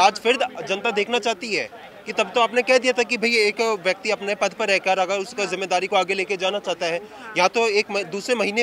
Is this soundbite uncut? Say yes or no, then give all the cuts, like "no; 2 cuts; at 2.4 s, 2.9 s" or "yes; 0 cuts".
yes; 0 cuts